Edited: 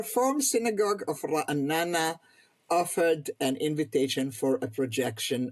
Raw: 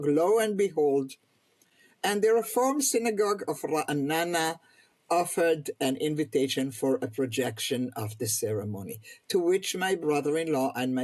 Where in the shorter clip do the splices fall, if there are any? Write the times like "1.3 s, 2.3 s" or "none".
none